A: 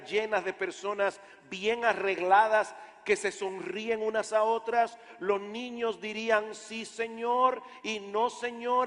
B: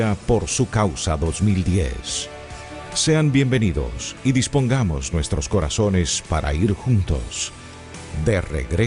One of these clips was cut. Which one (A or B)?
A